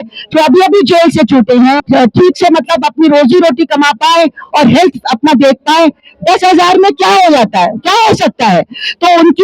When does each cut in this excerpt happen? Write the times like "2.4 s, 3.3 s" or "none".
1.8 s